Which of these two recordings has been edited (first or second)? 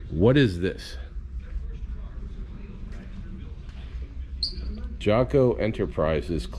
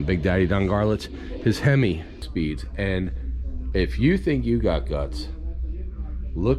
second